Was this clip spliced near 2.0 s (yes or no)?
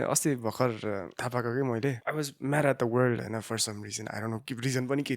yes